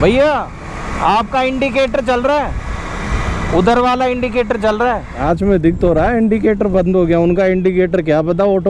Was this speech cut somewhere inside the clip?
no; 0 cuts

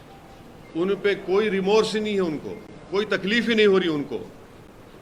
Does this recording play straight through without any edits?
yes; 0 cuts

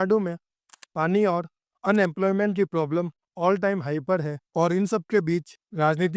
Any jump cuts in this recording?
no; 0 cuts

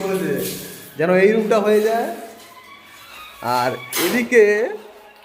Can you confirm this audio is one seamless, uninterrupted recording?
yes; 0 cuts

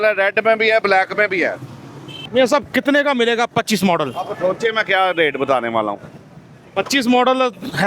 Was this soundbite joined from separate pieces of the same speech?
yes; 1 cut; at 2.1 s

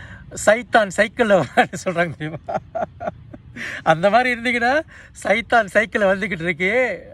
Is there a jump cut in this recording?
no; 0 cuts

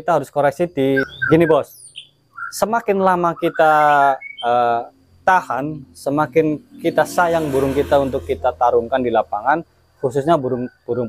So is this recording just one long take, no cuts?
no; 1 cut; at 1.1 s

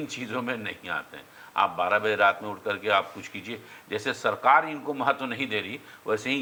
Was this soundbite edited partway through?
no; 0 cuts

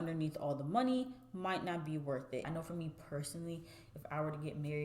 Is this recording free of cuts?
no; 1 cut; at 2.5 s

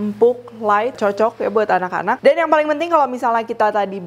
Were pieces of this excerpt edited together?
no; 0 cuts

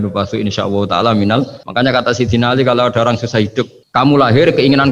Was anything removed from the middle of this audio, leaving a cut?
yes; 2 cuts; at 1.6 s, 3.8 s

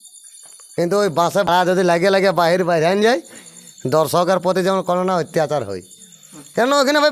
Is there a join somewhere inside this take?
yes; 1 cut; at 1.5 s

